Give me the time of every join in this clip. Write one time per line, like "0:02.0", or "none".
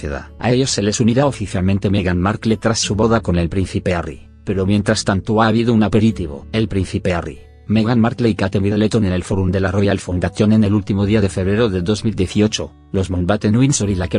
0:02.1